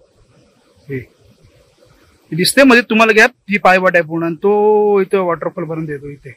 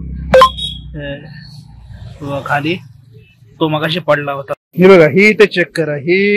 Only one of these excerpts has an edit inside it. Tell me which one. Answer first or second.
second